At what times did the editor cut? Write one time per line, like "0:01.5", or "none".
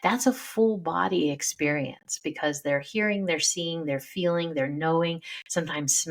none